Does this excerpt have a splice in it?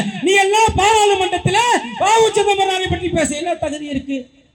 no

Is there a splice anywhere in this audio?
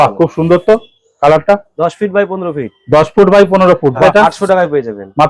yes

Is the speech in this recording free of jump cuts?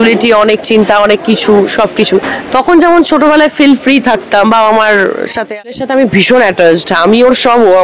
no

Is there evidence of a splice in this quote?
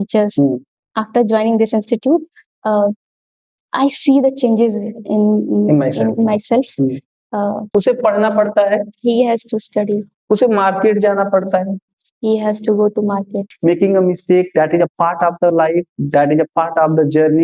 yes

